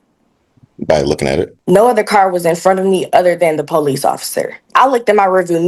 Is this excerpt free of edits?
no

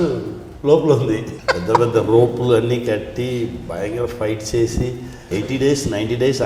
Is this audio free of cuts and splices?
no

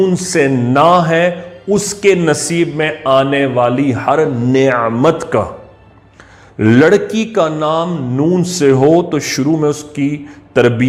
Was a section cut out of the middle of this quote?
no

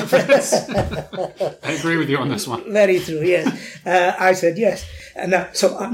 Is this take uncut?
yes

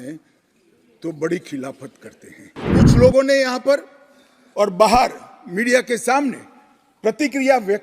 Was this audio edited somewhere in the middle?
yes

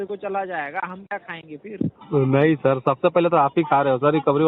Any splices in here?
no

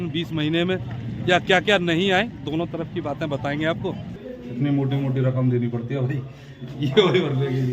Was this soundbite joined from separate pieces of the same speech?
yes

